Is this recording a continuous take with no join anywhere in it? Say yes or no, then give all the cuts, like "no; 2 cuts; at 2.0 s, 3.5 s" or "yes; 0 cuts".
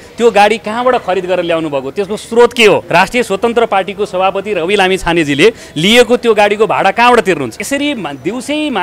no; 2 cuts; at 2.8 s, 7.6 s